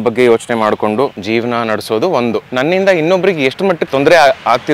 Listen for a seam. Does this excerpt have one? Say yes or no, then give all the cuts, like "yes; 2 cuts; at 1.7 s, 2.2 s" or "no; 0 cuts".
yes; 3 cuts; at 1.2 s, 2.5 s, 3.8 s